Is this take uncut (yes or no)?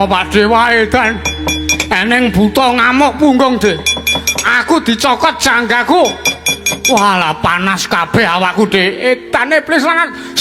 yes